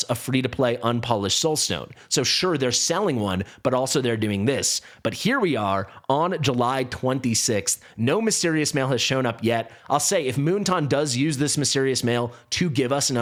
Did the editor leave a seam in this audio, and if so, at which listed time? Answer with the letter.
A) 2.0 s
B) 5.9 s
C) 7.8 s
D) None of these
D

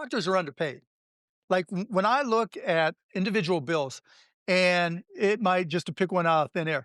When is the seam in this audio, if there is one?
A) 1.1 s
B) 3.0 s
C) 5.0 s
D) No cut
B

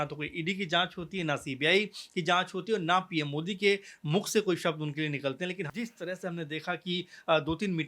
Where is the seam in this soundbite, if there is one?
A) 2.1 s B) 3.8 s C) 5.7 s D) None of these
C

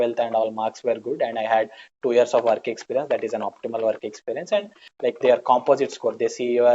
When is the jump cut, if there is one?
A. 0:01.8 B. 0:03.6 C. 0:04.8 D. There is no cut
C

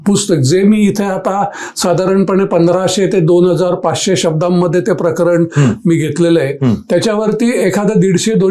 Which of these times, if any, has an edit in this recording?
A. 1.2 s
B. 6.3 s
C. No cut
C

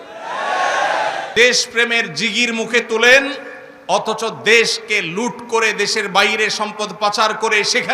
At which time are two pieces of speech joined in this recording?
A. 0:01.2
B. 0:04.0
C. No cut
A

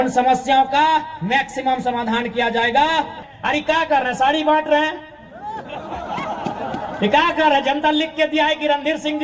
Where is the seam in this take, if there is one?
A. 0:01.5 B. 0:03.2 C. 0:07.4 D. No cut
B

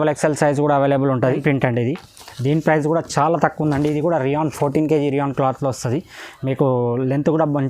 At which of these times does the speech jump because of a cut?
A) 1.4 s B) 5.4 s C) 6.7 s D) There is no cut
A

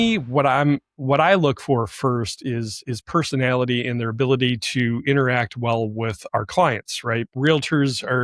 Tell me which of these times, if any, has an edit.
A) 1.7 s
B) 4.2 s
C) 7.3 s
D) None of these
C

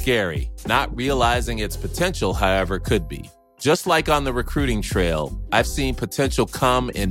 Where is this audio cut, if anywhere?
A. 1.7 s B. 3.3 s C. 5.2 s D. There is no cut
D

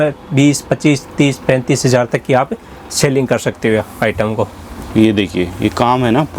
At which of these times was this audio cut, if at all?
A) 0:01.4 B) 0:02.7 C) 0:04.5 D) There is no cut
D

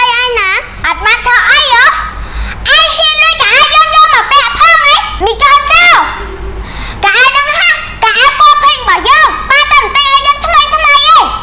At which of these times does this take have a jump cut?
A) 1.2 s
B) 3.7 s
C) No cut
C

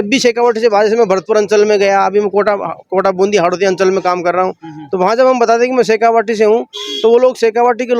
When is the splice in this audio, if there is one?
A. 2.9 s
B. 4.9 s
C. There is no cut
C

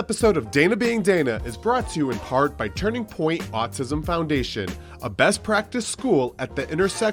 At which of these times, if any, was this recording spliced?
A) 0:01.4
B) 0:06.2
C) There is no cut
C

